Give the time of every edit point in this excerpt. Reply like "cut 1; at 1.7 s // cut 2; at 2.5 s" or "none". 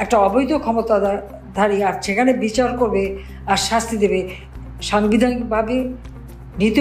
none